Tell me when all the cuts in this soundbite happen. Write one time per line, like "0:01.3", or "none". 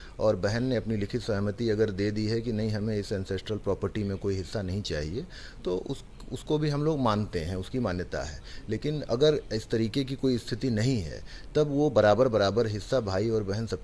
none